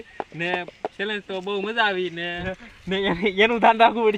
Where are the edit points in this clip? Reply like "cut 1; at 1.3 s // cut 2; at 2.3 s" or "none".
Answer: cut 1; at 2.5 s